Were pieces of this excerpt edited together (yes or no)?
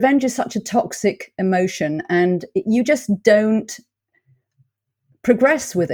no